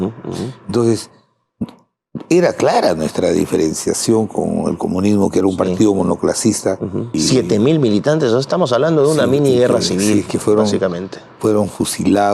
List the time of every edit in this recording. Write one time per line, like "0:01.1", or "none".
0:07.1